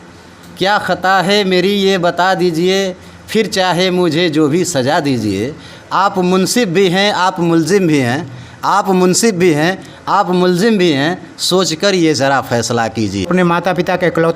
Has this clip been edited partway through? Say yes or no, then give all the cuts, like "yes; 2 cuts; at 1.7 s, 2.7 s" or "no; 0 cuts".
yes; 1 cut; at 13.3 s